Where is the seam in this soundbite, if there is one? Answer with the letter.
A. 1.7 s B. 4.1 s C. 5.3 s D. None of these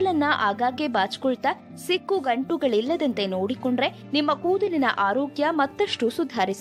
D